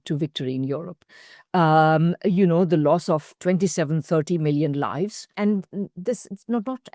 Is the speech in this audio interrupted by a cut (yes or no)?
yes